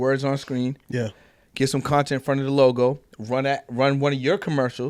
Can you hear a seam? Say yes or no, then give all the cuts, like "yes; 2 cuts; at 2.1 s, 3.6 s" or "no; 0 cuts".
no; 0 cuts